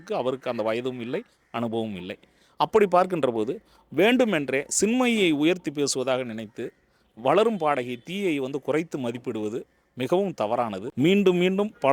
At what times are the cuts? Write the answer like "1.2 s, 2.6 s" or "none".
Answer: 10.8 s